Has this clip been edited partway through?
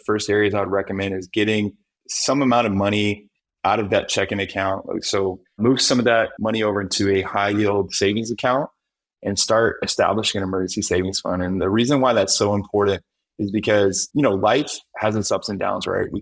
yes; 1 cut; at 5.5 s

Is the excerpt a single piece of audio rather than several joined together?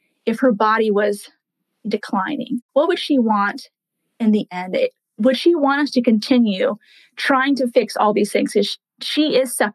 no; 2 cuts; at 2.6 s, 5.2 s

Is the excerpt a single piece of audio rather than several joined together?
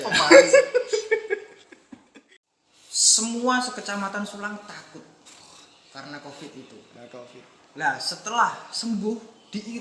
no; 1 cut; at 2.0 s

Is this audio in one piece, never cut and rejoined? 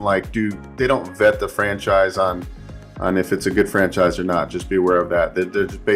yes; 0 cuts

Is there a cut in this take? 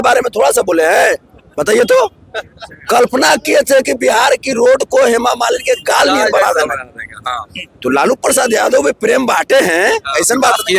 no; 0 cuts

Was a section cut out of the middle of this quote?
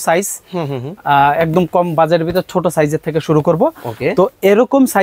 no; 0 cuts

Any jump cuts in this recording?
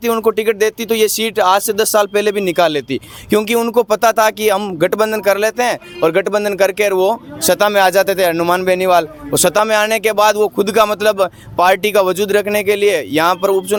no; 0 cuts

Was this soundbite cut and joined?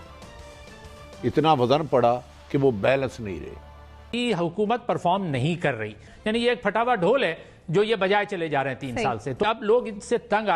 yes; 3 cuts; at 4.0 s, 6.1 s, 9.4 s

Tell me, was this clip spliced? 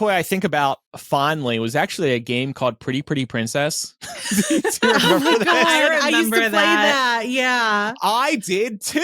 yes; 1 cut; at 0.9 s

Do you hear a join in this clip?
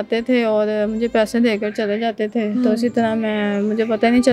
no; 0 cuts

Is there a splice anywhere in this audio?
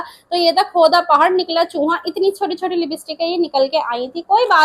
no; 0 cuts

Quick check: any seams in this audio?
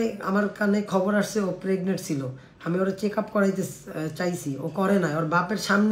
no; 0 cuts

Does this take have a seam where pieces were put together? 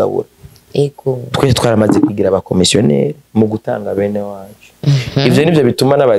no; 0 cuts

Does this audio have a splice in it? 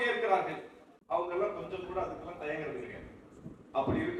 no; 0 cuts

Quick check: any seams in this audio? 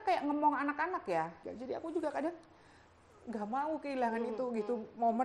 yes; 1 cut; at 1.4 s

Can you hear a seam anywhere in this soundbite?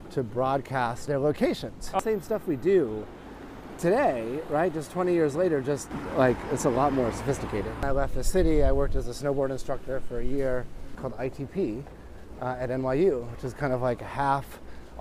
yes; 4 cuts; at 1.0 s, 2.0 s, 7.8 s, 10.9 s

